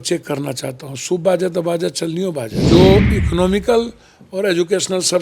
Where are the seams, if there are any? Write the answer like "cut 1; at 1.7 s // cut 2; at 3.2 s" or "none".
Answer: cut 1; at 2.5 s